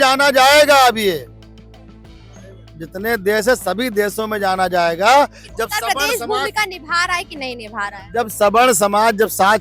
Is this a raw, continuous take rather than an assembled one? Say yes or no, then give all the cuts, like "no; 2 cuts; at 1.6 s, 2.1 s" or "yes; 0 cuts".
yes; 0 cuts